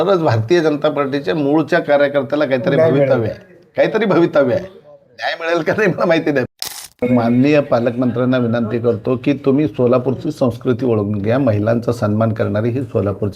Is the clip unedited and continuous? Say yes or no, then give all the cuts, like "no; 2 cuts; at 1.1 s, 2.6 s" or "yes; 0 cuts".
no; 1 cut; at 6.6 s